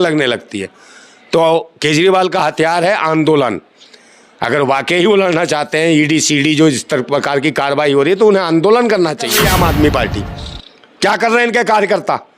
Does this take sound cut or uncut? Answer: cut